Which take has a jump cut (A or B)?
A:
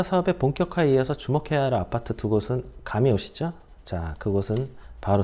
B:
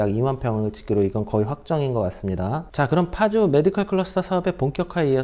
B